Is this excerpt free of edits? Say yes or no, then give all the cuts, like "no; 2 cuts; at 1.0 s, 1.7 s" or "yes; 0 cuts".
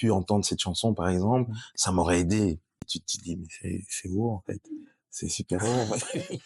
no; 1 cut; at 2.8 s